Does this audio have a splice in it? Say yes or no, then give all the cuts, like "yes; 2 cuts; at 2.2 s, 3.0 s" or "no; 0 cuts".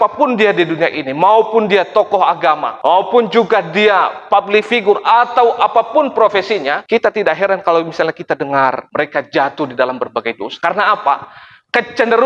yes; 1 cut; at 6.8 s